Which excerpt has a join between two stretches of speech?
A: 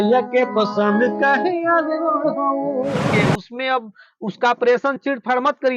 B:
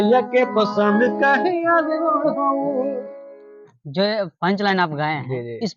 A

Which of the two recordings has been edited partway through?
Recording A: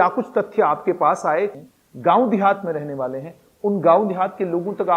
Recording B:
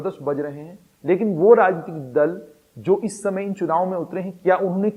A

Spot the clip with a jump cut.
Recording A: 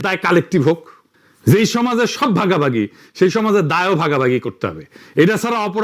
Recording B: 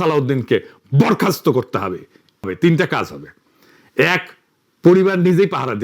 B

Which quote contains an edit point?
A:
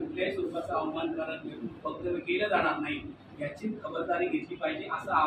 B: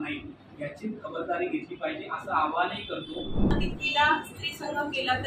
B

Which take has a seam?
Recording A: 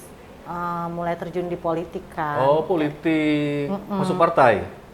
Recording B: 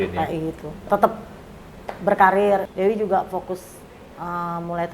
B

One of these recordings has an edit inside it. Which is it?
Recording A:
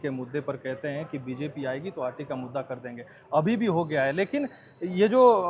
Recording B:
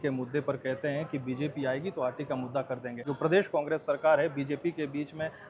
B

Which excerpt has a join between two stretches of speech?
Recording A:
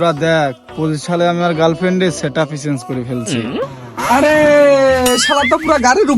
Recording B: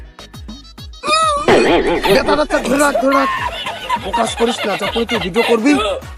A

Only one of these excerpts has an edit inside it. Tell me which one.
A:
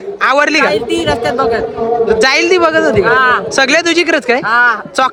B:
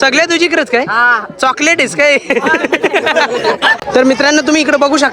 B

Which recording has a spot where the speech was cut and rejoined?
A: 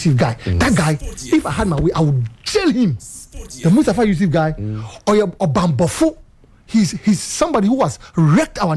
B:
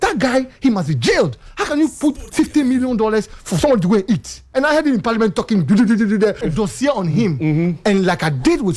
B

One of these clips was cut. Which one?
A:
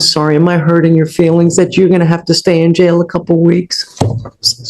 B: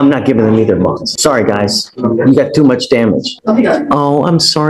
B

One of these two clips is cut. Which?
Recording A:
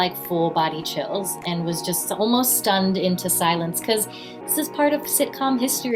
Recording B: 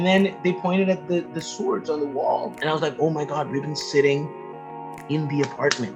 B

